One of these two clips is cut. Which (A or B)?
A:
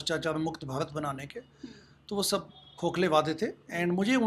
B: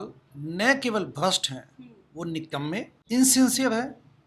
B